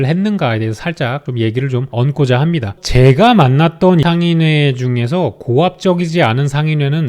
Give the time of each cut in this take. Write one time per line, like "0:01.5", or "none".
0:02.7
0:04.0